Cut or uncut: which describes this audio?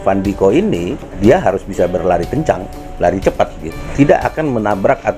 cut